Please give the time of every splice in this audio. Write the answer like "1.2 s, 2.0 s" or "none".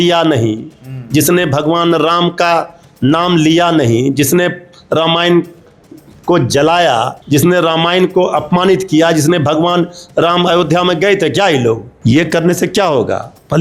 7.2 s, 11.9 s

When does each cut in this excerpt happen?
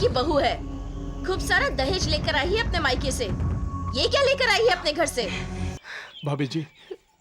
5.8 s

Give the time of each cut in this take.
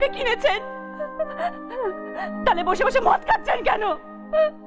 none

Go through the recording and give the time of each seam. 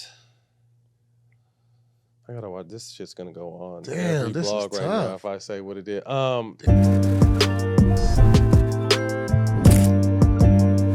6.5 s

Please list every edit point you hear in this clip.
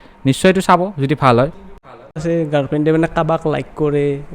2.2 s

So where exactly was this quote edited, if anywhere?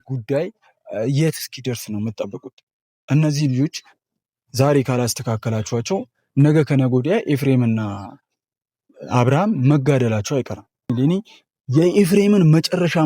10.9 s

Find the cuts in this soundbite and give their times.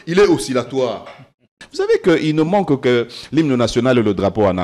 1.6 s

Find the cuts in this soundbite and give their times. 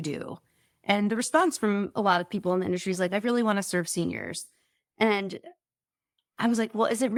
none

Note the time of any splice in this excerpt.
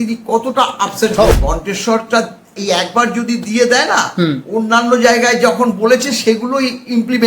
1.3 s, 2.5 s

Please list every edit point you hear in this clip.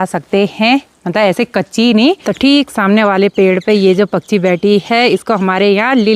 2.2 s

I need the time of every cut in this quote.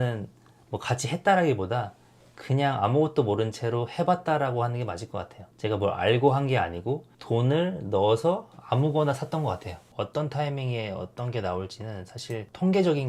9.8 s

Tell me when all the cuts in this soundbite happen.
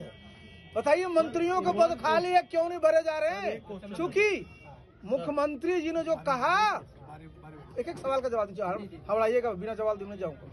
none

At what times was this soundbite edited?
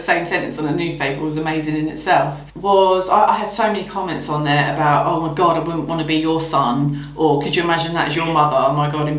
2.5 s

